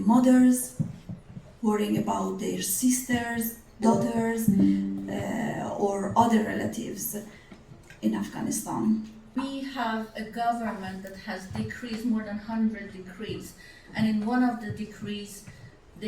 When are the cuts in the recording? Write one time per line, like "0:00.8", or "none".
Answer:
0:09.2